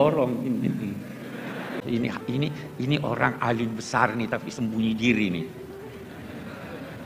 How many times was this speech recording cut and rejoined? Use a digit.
1